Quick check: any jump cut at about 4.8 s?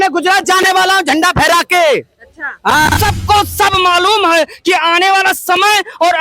no; 1 cut; at 3.0 s

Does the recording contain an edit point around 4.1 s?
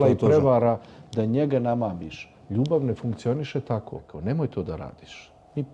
yes; 1 cut; at 4.1 s

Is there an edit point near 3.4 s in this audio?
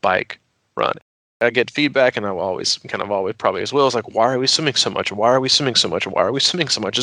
no; 1 cut; at 1.2 s

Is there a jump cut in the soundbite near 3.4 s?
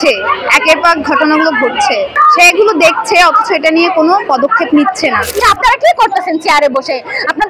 no; 2 cuts; at 2.2 s, 5.4 s

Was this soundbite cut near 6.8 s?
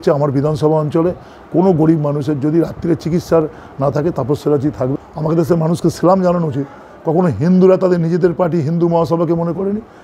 no; 1 cut; at 5.0 s

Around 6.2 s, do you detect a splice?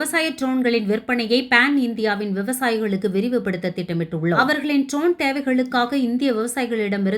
no; 1 cut; at 4.3 s

